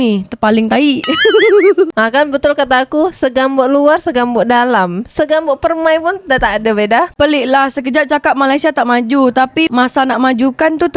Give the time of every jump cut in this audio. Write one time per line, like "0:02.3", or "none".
0:01.9
0:07.2

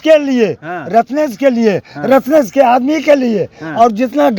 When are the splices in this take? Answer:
none

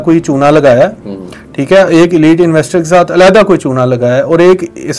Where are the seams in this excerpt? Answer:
none

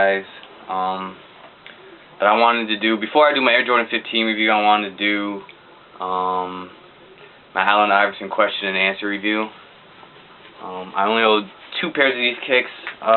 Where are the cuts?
0:02.6

